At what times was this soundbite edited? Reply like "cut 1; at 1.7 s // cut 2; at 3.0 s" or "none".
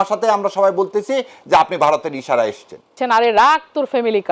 cut 1; at 2.9 s